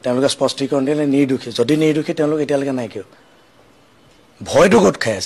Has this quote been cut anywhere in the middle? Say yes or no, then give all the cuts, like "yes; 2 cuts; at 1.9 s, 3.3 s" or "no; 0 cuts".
no; 0 cuts